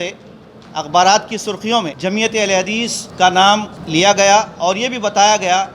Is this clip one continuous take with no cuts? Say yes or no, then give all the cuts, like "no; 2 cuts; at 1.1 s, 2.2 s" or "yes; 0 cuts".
no; 3 cuts; at 1.9 s, 3.0 s, 3.8 s